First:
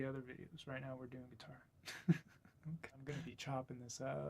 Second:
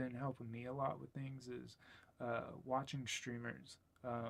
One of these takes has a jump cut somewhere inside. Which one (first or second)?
first